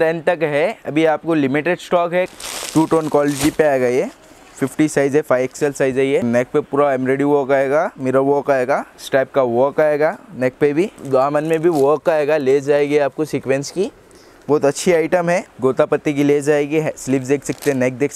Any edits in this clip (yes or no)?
yes